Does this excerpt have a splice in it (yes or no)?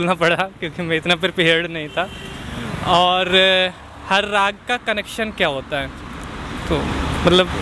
no